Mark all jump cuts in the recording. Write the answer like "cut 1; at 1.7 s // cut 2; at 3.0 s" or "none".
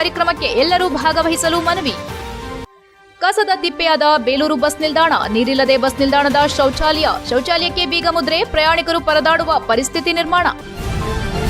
cut 1; at 10.6 s

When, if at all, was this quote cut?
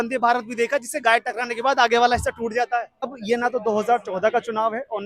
cut 1; at 3.2 s

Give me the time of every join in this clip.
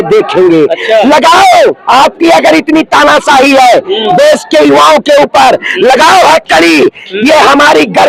none

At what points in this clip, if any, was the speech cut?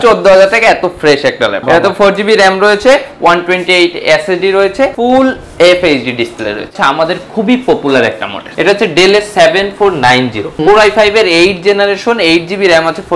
cut 1; at 1.6 s // cut 2; at 5.0 s // cut 3; at 6.7 s // cut 4; at 8.5 s // cut 5; at 10.5 s

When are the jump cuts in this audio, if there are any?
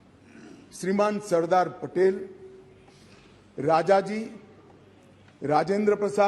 none

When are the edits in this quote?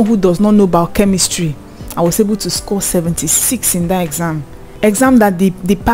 none

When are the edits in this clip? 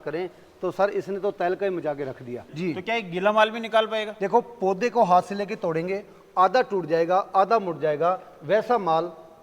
cut 1; at 2.4 s

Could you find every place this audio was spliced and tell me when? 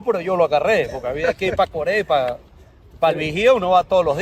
none

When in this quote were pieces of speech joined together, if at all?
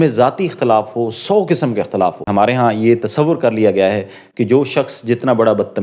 cut 1; at 2.3 s

